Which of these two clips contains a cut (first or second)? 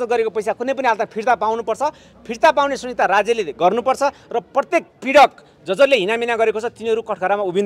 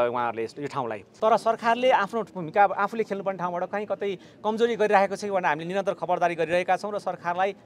second